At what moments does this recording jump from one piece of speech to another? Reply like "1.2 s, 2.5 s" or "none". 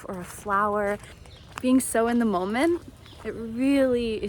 1.2 s